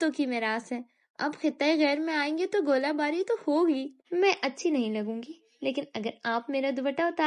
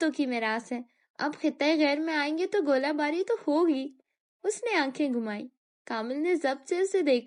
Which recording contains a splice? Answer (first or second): first